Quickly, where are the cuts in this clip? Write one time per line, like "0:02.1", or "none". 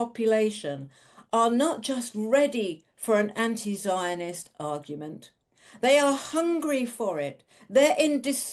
none